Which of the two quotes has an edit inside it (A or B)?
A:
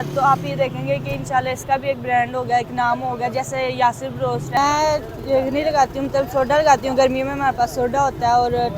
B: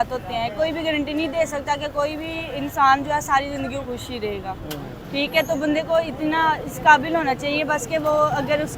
A